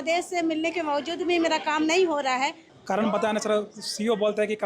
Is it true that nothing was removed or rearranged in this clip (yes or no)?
no